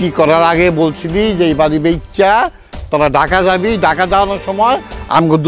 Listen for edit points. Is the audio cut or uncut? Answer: uncut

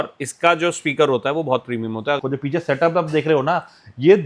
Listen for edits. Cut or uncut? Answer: cut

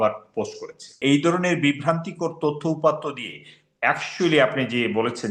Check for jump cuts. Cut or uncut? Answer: cut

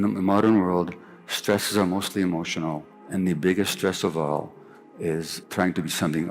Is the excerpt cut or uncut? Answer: cut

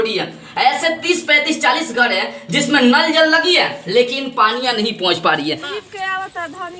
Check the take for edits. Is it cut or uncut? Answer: cut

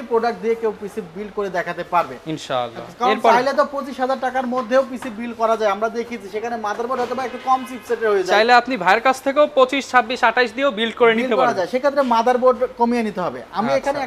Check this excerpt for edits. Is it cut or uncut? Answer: uncut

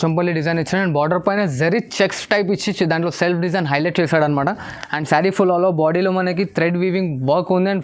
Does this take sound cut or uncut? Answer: uncut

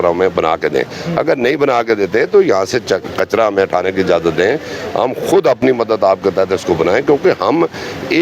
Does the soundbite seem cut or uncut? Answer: uncut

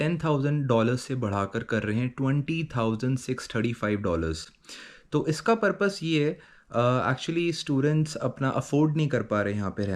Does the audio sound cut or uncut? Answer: uncut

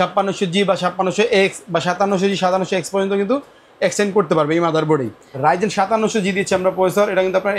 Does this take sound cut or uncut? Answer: cut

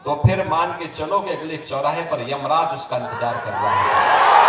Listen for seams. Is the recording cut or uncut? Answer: uncut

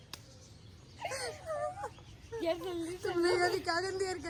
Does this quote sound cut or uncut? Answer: uncut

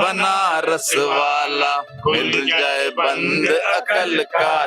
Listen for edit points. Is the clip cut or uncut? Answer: uncut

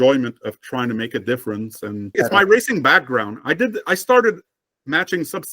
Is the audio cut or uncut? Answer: cut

